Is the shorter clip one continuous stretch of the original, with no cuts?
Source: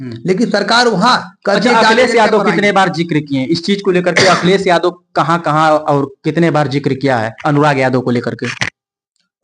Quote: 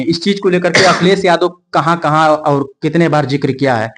yes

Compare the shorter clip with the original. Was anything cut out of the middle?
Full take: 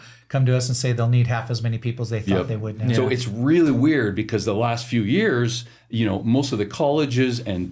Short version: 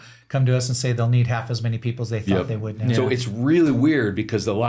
no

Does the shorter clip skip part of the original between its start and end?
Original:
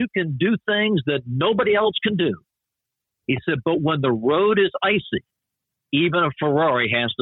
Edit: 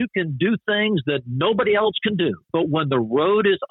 yes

